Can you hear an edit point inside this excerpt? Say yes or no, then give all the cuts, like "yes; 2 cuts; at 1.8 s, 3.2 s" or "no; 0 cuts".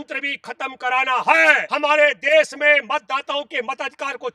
yes; 1 cut; at 1.7 s